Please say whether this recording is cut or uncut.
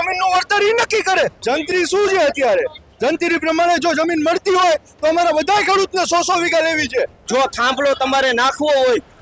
cut